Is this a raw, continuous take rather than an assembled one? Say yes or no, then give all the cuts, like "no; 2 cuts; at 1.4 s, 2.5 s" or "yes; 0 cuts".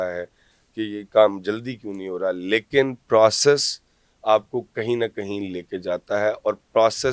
yes; 0 cuts